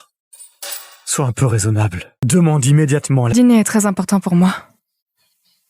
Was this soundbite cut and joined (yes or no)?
yes